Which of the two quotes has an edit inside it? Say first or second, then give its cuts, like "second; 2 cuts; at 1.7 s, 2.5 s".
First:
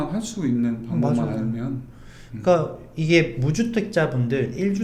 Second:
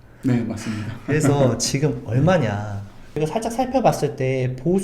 second; 1 cut; at 3.2 s